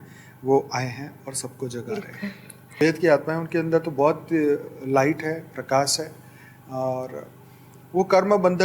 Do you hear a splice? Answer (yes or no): yes